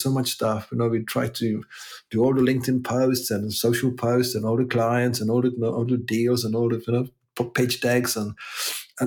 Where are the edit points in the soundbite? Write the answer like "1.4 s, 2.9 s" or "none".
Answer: none